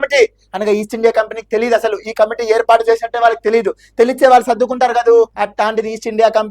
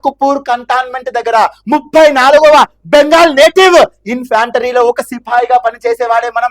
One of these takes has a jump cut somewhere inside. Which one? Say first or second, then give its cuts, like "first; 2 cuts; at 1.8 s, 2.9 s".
first; 1 cut; at 5.4 s